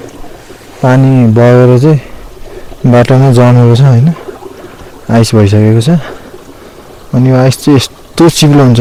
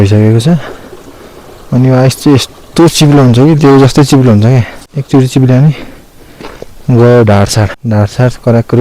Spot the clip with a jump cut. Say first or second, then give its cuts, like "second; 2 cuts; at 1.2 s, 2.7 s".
second; 2 cuts; at 4.9 s, 7.7 s